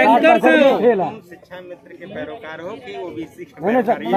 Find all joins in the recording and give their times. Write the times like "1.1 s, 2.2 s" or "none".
none